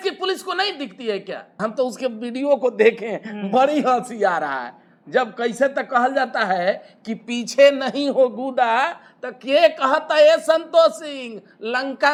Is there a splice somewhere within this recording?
no; 0 cuts

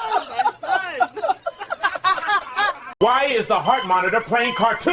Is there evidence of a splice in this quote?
yes; 1 cut; at 2.9 s

